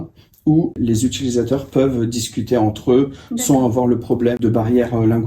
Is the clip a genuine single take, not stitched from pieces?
no; 2 cuts; at 0.8 s, 4.4 s

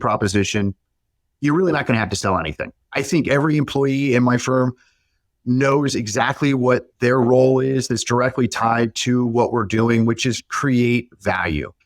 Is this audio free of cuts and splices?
no; 1 cut; at 2.8 s

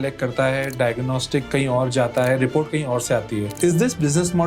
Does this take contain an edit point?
yes; 1 cut; at 3.5 s

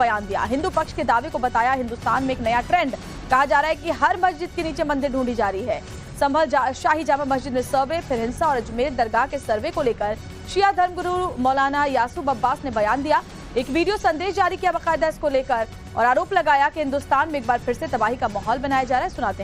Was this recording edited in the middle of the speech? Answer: yes; 1 cut; at 17.0 s

